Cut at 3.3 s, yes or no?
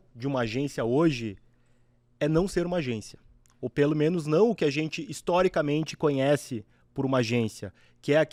no